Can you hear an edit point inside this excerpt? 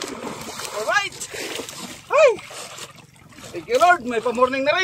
no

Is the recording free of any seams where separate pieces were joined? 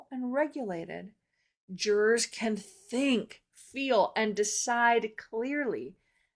yes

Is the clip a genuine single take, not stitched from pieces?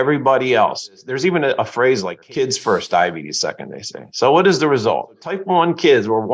no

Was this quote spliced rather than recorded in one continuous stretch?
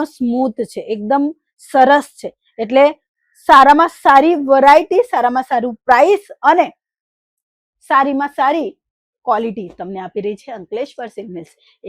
no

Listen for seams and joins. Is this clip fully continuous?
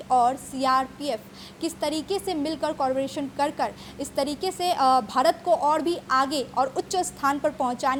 yes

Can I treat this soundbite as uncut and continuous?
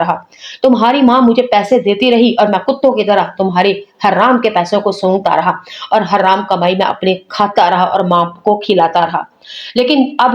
yes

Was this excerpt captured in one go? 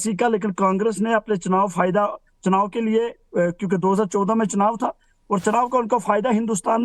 no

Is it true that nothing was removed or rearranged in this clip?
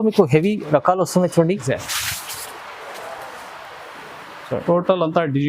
no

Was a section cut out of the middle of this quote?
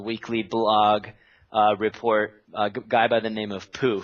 yes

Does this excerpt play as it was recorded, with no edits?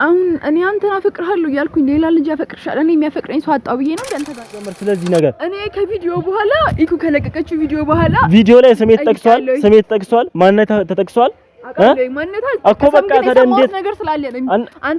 no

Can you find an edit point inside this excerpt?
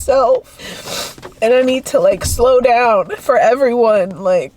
yes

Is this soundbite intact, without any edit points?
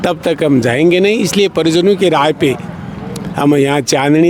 yes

